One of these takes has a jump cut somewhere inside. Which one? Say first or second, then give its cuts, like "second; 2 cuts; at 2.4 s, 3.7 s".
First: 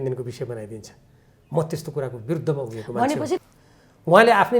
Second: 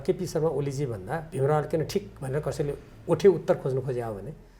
first; 1 cut; at 3.4 s